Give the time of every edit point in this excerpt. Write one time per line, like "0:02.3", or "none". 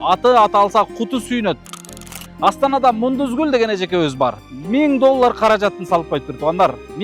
0:01.6
0:04.5